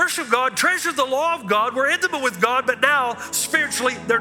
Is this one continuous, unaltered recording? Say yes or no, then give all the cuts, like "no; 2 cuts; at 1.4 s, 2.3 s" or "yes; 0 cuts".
yes; 0 cuts